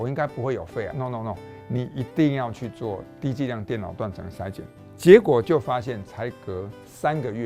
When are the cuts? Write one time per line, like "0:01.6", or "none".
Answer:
0:00.9
0:04.7